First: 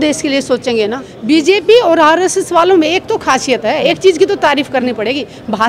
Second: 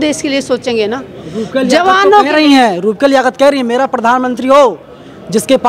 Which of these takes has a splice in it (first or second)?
first